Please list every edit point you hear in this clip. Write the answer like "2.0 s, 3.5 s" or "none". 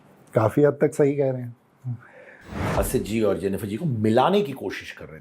2.7 s

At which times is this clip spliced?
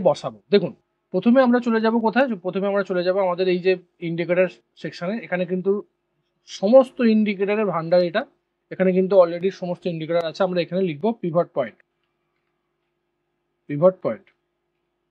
none

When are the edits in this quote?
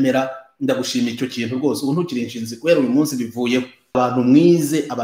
4.0 s

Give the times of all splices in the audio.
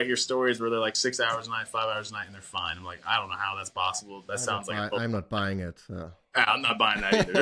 none

